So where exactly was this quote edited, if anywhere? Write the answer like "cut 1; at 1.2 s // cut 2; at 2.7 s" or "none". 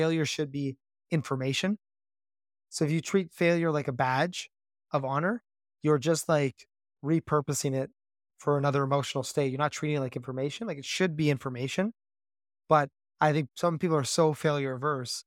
cut 1; at 13.5 s